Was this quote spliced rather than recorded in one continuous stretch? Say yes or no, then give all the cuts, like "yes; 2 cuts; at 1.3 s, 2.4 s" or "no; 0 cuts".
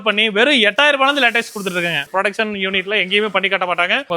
yes; 1 cut; at 2.1 s